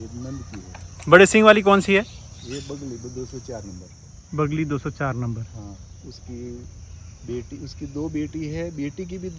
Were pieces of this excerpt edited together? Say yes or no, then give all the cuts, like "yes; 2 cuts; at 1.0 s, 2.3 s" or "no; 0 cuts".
no; 0 cuts